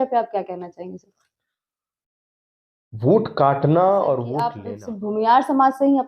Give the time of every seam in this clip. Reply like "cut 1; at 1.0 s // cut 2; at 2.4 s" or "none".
cut 1; at 4.7 s